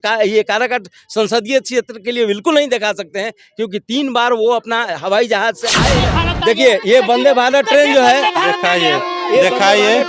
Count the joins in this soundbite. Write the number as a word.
one